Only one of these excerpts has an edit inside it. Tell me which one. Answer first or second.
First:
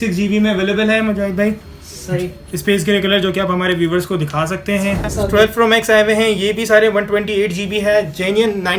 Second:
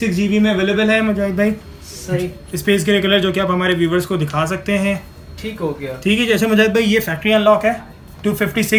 first